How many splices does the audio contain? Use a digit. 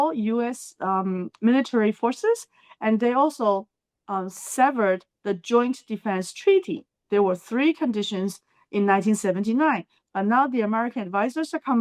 0